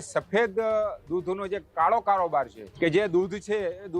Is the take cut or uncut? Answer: cut